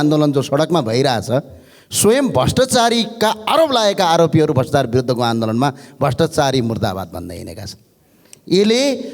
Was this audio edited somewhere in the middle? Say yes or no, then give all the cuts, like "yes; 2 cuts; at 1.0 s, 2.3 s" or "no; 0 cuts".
no; 0 cuts